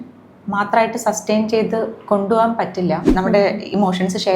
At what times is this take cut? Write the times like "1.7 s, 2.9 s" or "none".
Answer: 3.1 s